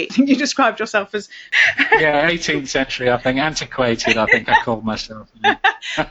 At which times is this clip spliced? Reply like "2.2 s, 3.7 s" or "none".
1.6 s

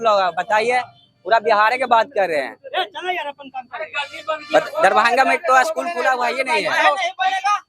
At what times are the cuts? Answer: none

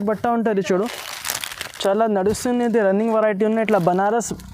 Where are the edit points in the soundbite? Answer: 1.1 s

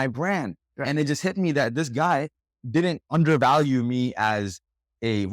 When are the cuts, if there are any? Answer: 3.0 s

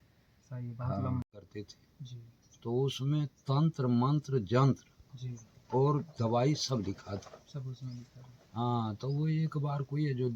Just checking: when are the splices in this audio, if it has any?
1.2 s

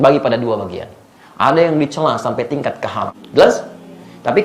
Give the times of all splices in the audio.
3.1 s

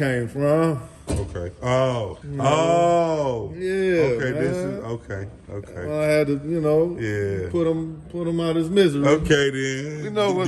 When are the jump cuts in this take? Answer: 2.2 s

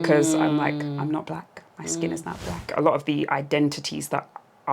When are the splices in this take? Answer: 2.7 s

